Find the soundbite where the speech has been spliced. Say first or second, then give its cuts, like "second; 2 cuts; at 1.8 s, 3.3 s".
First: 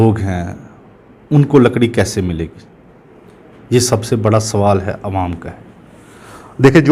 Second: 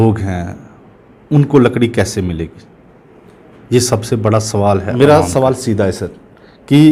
second; 1 cut; at 4.9 s